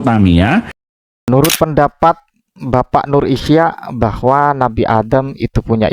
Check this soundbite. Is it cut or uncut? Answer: cut